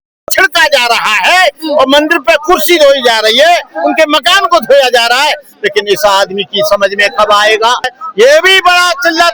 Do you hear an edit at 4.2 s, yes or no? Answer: no